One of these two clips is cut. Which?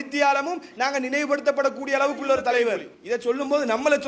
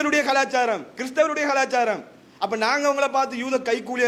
first; 1 cut; at 2.9 s

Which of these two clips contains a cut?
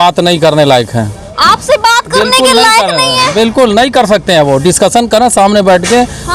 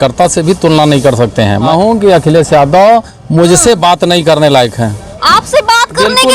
second; 1 cut; at 1.7 s

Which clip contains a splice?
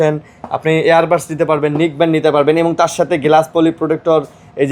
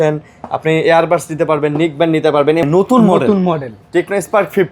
second; 1 cut; at 2.6 s

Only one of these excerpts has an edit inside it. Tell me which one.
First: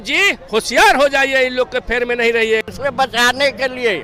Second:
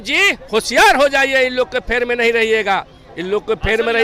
first; 1 cut; at 2.6 s

